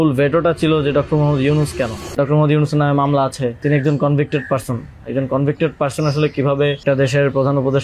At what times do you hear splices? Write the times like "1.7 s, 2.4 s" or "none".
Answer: 2.1 s, 3.6 s, 6.8 s